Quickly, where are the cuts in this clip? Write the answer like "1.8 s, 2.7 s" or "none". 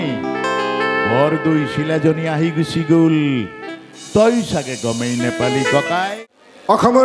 6.1 s